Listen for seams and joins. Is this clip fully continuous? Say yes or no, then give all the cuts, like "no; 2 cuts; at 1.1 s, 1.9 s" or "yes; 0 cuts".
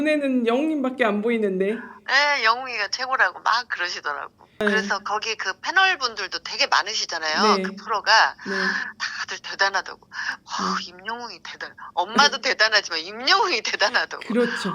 no; 1 cut; at 4.6 s